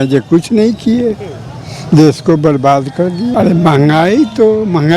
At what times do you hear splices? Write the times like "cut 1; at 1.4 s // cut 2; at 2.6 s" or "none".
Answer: cut 1; at 3.3 s